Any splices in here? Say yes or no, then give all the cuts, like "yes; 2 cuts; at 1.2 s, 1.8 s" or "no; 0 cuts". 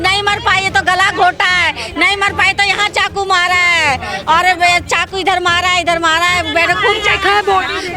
no; 0 cuts